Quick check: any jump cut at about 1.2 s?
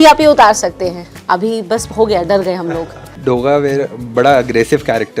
no; 1 cut; at 3.2 s

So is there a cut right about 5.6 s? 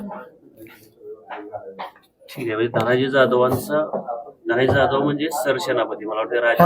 no; 0 cuts

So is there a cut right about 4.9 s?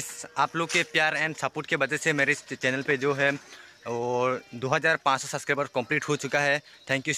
no; 0 cuts

